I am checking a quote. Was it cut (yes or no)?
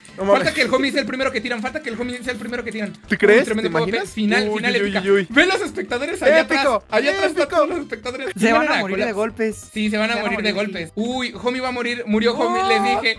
no